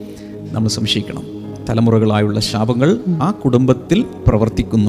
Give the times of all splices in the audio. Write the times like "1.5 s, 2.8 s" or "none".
none